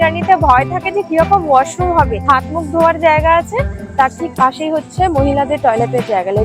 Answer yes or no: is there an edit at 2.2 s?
yes